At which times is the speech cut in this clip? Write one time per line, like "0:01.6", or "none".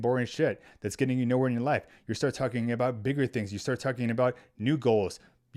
none